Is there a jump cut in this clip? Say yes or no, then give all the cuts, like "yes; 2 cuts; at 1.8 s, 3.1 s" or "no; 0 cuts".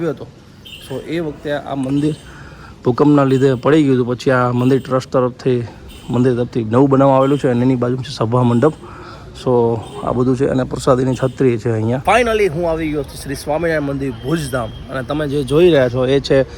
yes; 1 cut; at 12.0 s